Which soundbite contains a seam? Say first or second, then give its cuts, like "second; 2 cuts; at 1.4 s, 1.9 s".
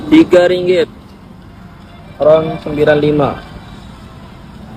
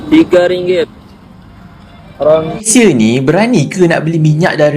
second; 1 cut; at 2.7 s